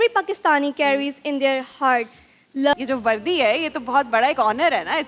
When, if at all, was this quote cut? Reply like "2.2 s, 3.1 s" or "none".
2.7 s

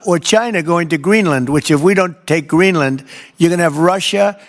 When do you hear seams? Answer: none

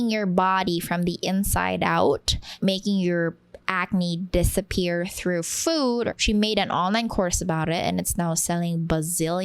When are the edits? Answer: 2.4 s, 6.1 s

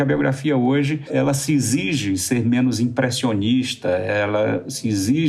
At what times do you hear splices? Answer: 1.1 s

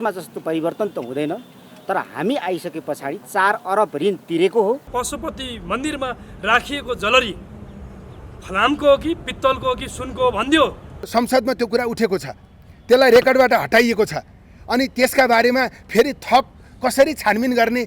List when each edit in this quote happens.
4.9 s, 11.1 s

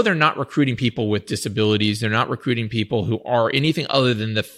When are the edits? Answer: none

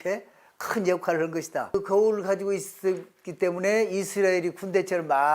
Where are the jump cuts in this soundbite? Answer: 1.7 s

